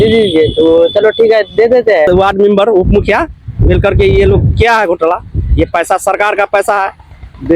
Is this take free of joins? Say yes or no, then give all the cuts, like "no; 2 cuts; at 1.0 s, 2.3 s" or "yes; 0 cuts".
no; 1 cut; at 2.1 s